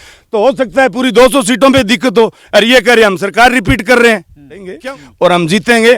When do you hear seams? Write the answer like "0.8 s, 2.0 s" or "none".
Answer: 4.7 s

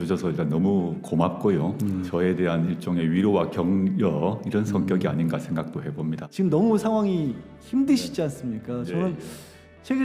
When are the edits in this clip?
2.0 s, 6.2 s

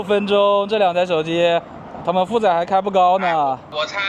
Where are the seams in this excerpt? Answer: none

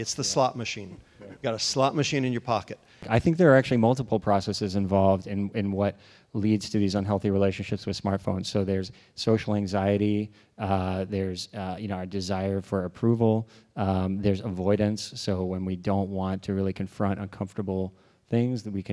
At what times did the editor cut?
3.1 s

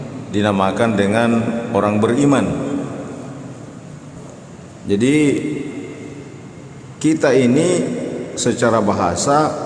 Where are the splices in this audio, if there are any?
4.2 s

